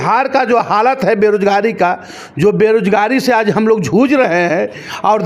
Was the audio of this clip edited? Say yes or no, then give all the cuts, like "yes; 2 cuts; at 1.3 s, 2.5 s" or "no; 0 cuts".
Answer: no; 0 cuts